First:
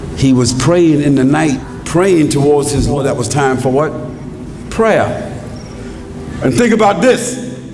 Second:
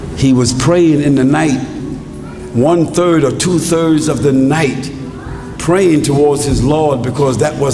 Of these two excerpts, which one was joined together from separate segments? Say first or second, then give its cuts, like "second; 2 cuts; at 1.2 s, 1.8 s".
first; 2 cuts; at 1.7 s, 2.9 s